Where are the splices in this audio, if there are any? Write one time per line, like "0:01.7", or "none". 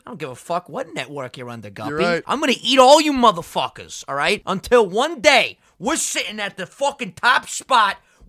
0:02.2
0:04.4

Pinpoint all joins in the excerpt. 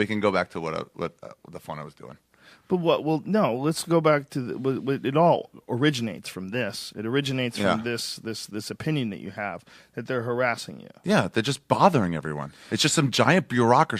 0:09.1

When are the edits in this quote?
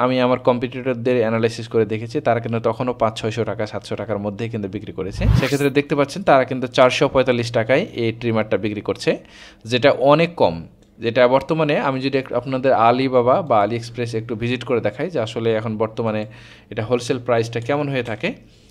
0:05.3

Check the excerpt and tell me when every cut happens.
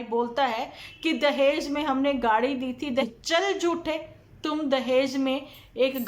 0:03.0

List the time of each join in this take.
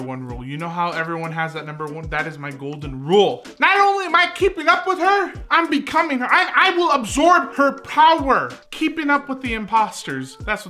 0:07.5
0:08.6

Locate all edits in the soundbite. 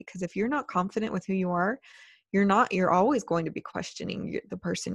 none

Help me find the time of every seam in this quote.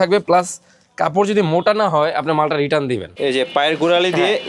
0:03.1

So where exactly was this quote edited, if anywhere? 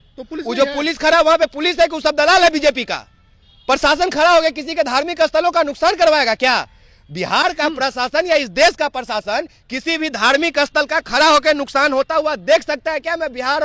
none

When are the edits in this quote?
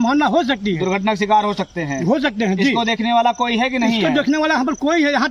none

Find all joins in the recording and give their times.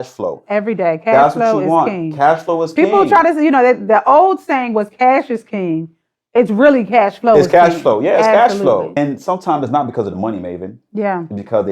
0:08.9

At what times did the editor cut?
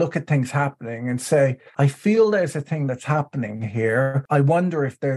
0:01.6
0:04.2

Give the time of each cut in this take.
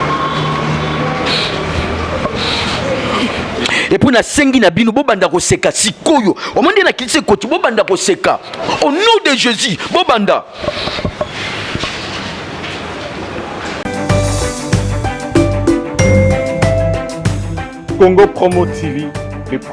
0:13.9

